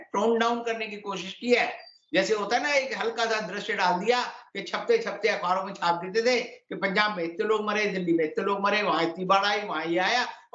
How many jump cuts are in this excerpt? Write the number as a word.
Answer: zero